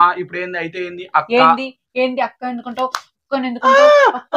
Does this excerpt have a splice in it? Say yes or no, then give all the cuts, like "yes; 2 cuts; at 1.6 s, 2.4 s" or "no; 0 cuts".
no; 0 cuts